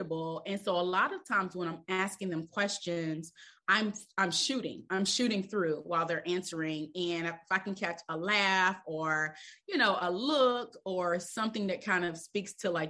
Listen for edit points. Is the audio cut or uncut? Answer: uncut